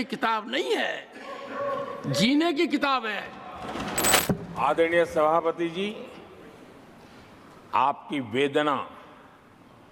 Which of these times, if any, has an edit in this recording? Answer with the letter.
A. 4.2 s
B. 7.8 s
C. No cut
A